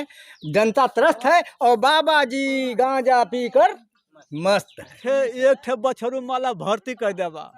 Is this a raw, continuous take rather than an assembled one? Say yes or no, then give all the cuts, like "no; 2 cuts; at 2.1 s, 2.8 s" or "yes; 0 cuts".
no; 1 cut; at 5.0 s